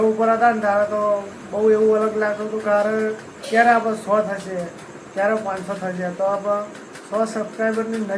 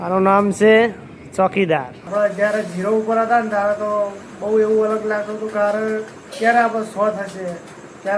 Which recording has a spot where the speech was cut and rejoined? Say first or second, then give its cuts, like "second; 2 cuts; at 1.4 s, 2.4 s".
second; 1 cut; at 2.0 s